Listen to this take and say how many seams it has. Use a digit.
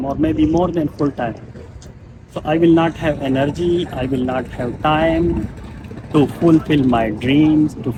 0